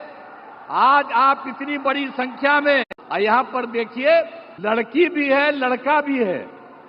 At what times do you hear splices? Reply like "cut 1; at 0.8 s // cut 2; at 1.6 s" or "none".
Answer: cut 1; at 3.0 s // cut 2; at 4.4 s